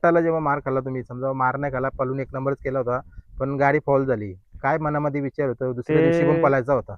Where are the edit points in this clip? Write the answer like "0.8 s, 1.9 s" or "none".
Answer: none